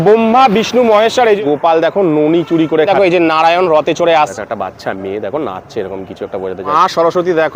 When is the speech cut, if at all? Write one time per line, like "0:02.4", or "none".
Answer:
0:01.4
0:02.9
0:04.3
0:06.7